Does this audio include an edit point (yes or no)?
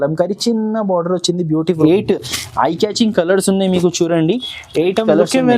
yes